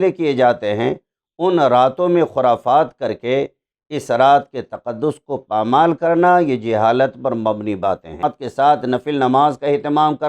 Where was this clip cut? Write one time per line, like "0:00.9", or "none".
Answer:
0:08.3